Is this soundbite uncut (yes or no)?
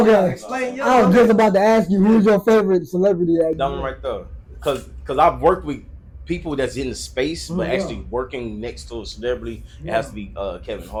yes